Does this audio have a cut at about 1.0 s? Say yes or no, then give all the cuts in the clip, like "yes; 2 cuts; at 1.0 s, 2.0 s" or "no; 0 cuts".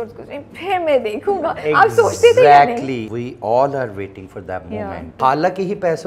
no; 2 cuts; at 3.1 s, 5.1 s